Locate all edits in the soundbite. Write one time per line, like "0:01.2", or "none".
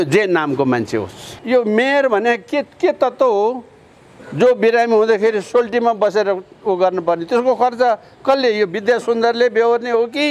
0:01.2

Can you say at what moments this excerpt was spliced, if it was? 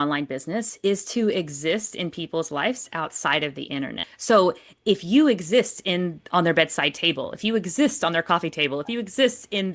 0:04.1

